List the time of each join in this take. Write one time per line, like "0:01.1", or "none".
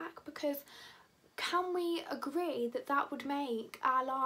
none